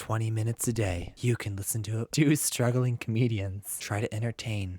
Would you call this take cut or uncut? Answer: cut